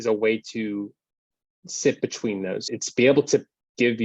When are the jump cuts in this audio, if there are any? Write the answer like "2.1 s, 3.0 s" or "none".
2.7 s